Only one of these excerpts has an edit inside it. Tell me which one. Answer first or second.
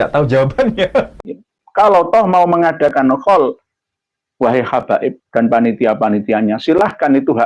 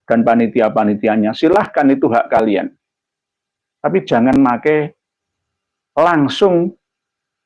first